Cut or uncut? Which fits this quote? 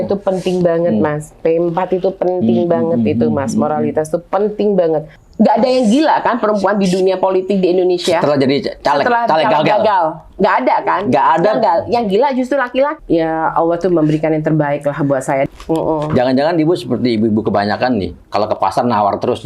cut